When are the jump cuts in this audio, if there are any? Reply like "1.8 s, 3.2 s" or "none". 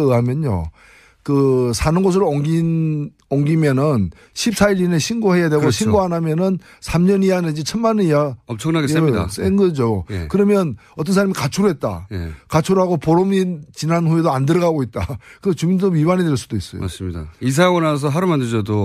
6.1 s